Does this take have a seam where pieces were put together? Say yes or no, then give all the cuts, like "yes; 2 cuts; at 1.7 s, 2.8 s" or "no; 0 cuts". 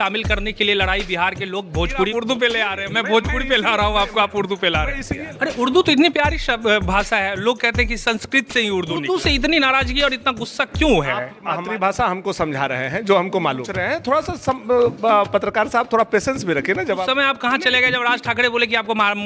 yes; 6 cuts; at 2.1 s, 5.1 s, 9.0 s, 11.6 s, 13.8 s, 17.0 s